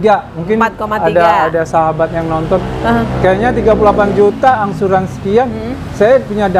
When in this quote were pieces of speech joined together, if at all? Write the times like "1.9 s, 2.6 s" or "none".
none